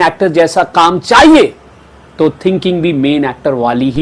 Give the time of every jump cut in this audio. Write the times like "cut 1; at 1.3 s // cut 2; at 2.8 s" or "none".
none

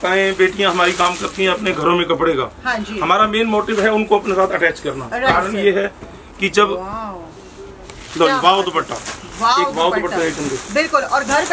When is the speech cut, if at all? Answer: none

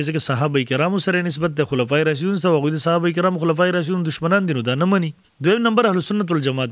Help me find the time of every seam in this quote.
cut 1; at 5.2 s

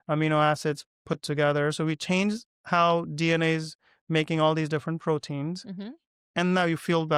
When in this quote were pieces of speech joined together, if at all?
none

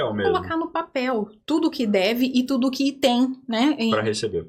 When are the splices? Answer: none

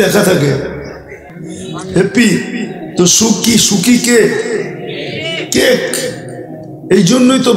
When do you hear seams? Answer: none

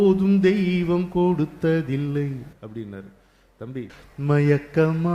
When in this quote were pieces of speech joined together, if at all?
cut 1; at 3.7 s

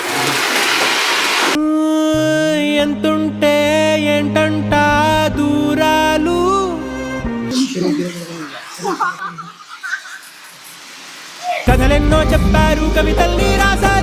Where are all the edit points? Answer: none

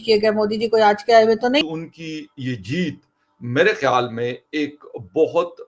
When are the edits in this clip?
cut 1; at 1.6 s

